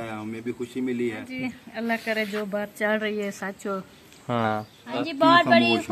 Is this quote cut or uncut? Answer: cut